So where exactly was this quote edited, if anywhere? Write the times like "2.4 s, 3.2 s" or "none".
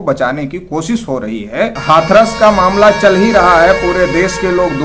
1.8 s